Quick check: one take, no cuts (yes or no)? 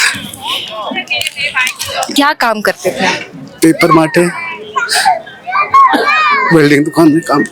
no